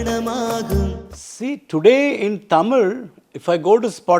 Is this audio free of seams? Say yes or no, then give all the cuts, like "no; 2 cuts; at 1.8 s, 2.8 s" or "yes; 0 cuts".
yes; 0 cuts